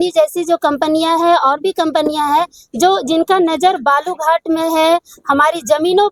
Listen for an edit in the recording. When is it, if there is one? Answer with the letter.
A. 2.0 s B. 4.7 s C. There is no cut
C